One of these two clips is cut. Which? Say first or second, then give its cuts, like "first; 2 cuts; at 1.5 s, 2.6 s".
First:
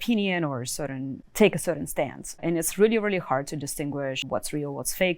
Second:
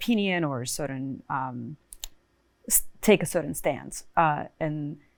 first; 3 cuts; at 1.2 s, 2.4 s, 4.2 s